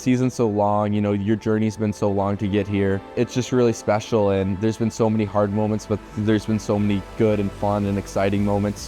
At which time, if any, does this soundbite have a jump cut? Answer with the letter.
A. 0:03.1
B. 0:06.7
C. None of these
A